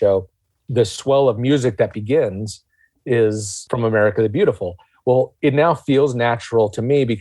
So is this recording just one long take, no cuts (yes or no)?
no